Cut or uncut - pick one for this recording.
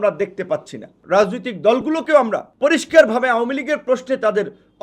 cut